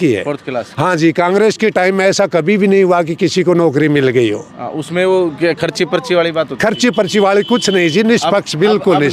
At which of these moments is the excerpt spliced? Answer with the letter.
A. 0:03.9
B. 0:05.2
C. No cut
C